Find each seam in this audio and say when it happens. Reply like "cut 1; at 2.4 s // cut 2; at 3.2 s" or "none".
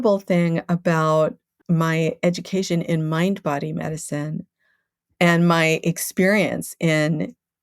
cut 1; at 1.5 s